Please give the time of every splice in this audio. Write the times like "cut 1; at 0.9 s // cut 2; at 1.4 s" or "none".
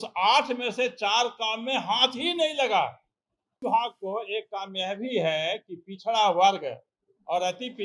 cut 1; at 3.7 s